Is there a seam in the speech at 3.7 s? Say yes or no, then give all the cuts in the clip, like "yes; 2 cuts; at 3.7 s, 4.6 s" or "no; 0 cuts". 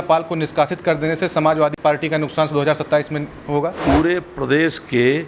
yes; 2 cuts; at 1.8 s, 3.7 s